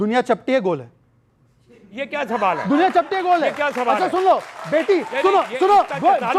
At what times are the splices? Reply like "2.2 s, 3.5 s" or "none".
none